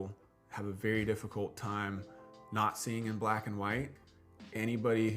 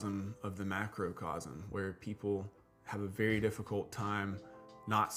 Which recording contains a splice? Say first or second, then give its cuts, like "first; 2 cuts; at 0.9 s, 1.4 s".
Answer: first; 1 cut; at 4.0 s